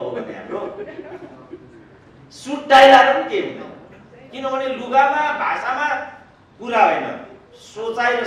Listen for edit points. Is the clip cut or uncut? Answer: uncut